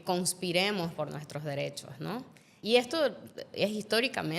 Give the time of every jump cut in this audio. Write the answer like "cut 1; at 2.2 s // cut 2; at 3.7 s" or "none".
cut 1; at 2.5 s